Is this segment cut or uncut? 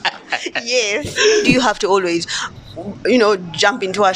cut